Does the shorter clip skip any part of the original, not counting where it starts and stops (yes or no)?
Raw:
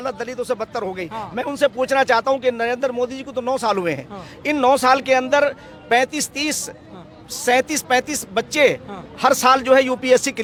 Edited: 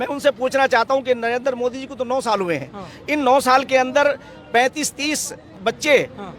yes